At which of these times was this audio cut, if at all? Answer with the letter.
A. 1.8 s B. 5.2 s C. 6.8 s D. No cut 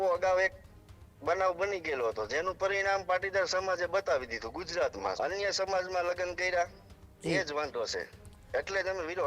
B